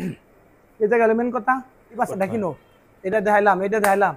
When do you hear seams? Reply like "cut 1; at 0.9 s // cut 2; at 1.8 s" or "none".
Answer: cut 1; at 2.0 s